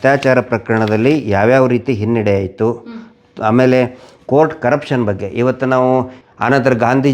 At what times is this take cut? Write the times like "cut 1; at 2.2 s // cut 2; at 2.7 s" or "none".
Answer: cut 1; at 6.2 s